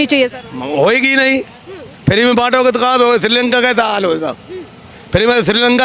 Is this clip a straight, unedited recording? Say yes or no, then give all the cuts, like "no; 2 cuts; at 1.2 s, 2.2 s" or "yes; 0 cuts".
yes; 0 cuts